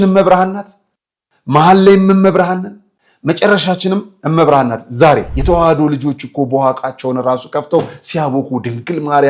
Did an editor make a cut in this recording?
yes; 1 cut; at 5.3 s

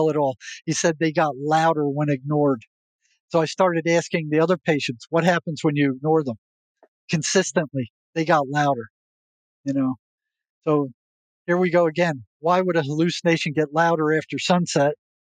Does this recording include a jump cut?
no; 0 cuts

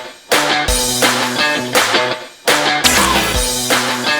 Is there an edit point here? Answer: yes; 1 cut; at 2.6 s

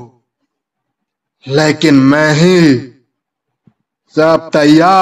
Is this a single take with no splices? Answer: yes; 0 cuts

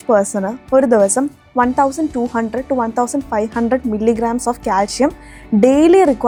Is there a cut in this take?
no; 0 cuts

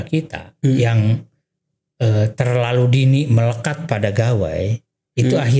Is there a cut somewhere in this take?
no; 0 cuts

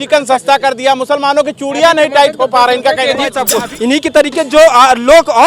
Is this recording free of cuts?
no; 1 cut; at 3.4 s

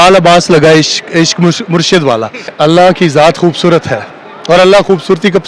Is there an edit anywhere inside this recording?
yes; 1 cut; at 2.5 s

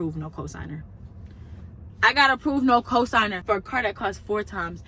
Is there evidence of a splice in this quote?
no; 0 cuts

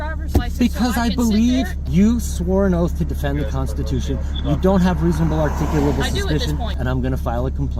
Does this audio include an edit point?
yes; 2 cuts; at 1.8 s, 6.7 s

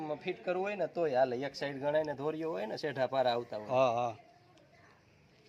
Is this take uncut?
yes; 0 cuts

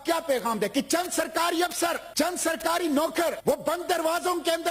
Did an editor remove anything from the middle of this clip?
yes; 2 cuts; at 2.1 s, 3.4 s

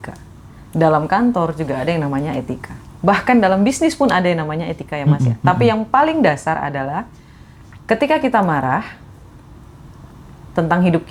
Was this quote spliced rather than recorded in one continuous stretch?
no; 0 cuts

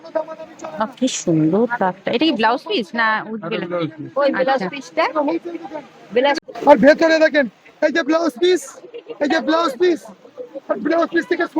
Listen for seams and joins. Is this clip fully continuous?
no; 1 cut; at 6.4 s

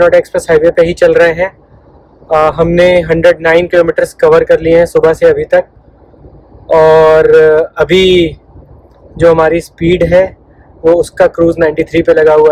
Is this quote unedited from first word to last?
yes; 0 cuts

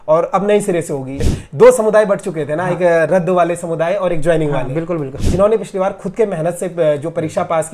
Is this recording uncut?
no; 2 cuts; at 1.3 s, 5.1 s

